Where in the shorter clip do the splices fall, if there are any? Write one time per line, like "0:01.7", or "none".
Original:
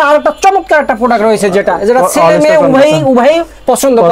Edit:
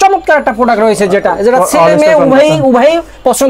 none